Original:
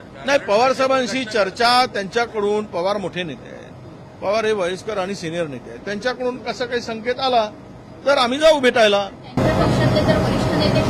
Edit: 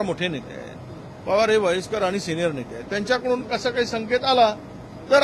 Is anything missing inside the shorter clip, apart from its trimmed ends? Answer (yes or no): no